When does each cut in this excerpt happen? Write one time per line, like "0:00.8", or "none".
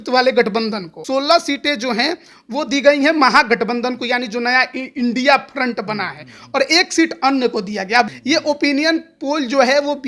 0:01.0
0:08.2